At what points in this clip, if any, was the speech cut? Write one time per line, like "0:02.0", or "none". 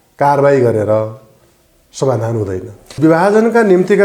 0:03.0